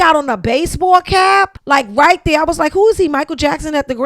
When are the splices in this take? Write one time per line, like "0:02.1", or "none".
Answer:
0:01.6